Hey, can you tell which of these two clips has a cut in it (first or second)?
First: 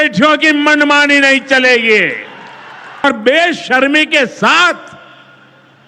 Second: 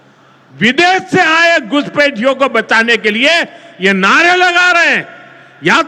first